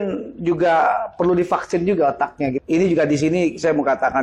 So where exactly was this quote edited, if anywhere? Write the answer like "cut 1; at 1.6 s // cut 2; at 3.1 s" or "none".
cut 1; at 2.6 s